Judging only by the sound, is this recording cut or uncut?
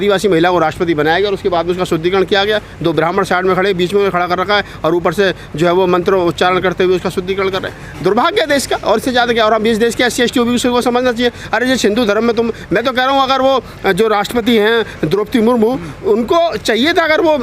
uncut